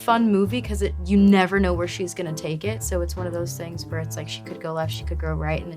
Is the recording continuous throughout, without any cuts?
yes; 0 cuts

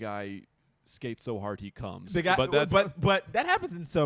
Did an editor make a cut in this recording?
no; 0 cuts

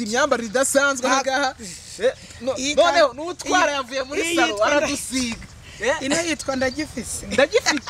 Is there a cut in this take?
no; 0 cuts

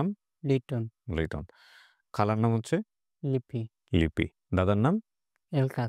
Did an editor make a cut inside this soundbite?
no; 0 cuts

